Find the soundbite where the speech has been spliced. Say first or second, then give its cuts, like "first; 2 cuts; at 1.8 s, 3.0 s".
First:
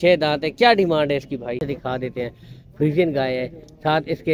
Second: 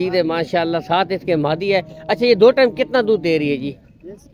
first; 1 cut; at 1.6 s